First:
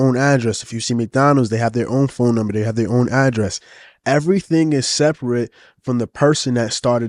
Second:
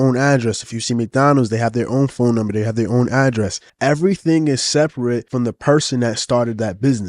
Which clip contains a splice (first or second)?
second